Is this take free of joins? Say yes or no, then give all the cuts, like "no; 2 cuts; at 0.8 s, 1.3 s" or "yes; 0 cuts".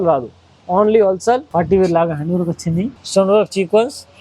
no; 2 cuts; at 1.5 s, 3.0 s